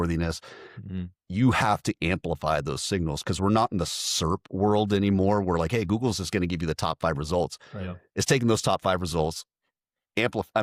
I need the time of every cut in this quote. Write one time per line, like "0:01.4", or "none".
none